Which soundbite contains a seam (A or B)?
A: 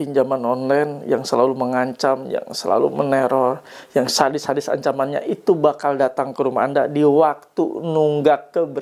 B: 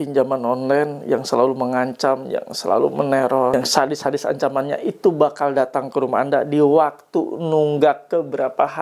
B